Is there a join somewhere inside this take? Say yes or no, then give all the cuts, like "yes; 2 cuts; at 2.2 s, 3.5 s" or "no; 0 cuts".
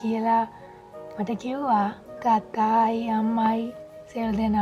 yes; 1 cut; at 2.1 s